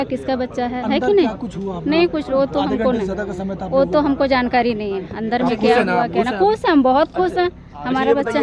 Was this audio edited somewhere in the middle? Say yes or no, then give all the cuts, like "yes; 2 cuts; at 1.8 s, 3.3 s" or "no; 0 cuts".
no; 0 cuts